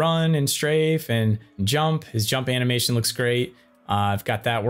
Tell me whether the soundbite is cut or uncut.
cut